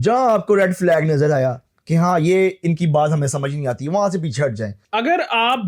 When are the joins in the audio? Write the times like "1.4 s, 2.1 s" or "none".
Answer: 4.8 s